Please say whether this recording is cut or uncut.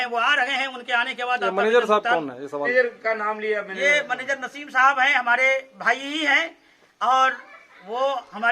cut